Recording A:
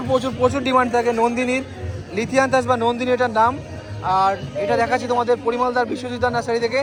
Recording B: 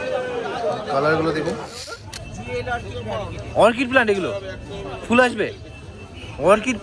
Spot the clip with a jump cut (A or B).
B